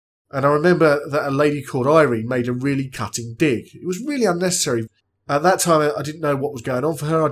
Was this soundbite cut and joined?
yes; 1 cut; at 4.8 s

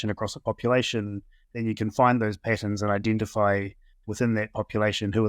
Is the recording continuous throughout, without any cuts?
yes; 0 cuts

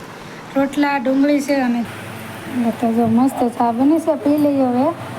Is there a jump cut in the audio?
yes; 1 cut; at 1.9 s

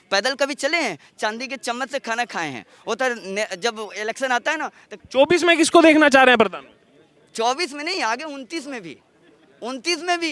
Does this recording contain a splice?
yes; 1 cut; at 5.0 s

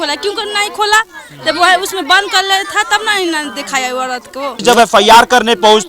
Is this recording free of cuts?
no; 1 cut; at 4.6 s

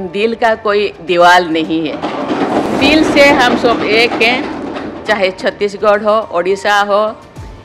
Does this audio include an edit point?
yes; 1 cut; at 2.7 s

